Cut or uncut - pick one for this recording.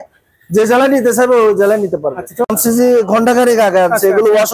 cut